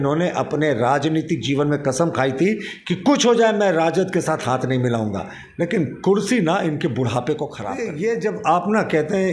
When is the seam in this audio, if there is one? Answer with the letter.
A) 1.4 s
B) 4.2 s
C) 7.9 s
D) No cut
C